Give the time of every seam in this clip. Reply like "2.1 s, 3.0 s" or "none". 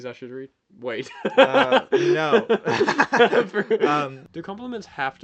4.2 s